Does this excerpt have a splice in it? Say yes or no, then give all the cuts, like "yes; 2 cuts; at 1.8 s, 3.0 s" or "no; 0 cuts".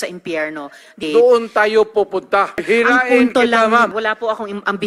yes; 3 cuts; at 1.0 s, 2.6 s, 3.9 s